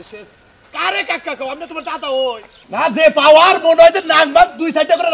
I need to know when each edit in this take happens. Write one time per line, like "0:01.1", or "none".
0:02.4